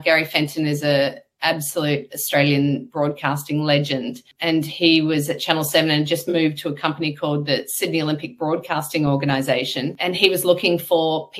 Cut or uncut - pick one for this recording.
cut